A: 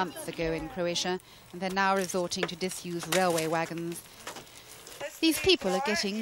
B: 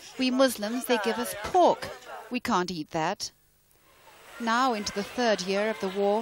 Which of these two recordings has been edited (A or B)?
A